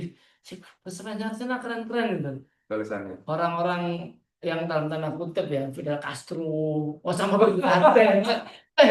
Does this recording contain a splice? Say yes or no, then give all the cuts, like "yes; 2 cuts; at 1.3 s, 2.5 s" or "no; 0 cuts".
no; 0 cuts